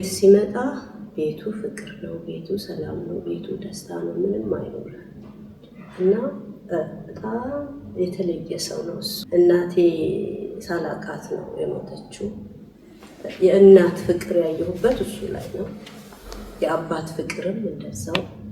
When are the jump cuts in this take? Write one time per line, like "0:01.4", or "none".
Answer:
0:09.1